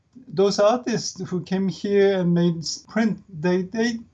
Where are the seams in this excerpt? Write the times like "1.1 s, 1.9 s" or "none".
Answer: 2.8 s